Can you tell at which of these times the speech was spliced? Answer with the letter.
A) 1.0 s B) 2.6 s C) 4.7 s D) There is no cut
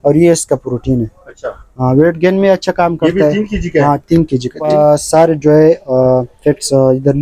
C